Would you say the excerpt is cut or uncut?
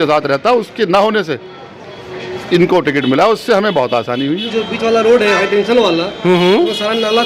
cut